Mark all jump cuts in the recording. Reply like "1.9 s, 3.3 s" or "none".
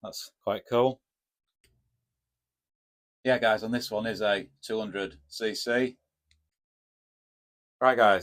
none